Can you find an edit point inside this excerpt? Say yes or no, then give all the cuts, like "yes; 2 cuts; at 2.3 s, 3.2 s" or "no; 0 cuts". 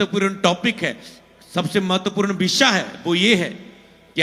no; 0 cuts